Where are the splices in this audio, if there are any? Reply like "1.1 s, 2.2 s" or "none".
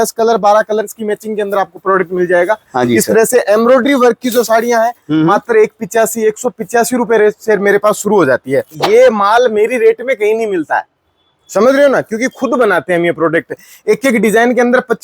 8.8 s